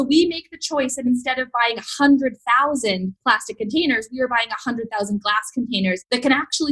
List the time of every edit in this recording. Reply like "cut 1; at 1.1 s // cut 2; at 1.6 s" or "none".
cut 1; at 3.1 s